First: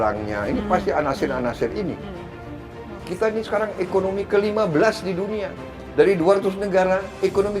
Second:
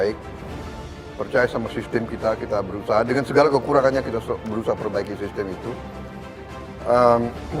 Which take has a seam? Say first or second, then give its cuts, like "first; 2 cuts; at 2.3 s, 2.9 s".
first; 1 cut; at 2.5 s